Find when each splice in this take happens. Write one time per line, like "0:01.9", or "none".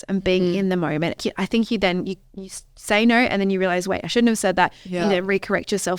0:01.2